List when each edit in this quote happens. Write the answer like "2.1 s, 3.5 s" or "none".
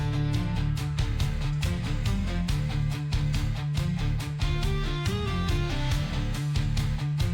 none